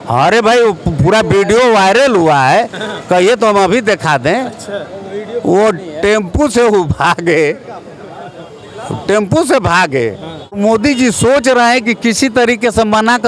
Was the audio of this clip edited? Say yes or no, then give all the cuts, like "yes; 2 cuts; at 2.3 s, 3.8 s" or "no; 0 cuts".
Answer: yes; 1 cut; at 10.6 s